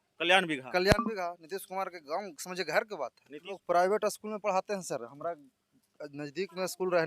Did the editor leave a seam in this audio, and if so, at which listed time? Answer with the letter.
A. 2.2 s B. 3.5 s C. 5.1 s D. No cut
B